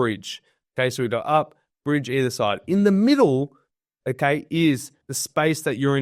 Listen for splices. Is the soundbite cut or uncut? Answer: uncut